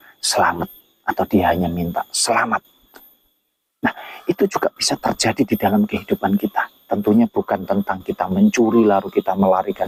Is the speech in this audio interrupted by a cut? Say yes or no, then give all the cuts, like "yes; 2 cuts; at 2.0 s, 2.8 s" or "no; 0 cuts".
no; 0 cuts